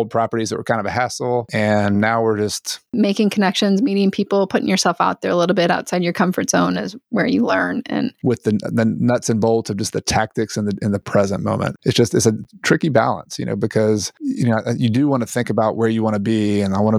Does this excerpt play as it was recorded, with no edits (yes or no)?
no